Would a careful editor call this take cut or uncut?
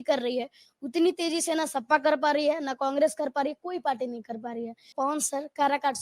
cut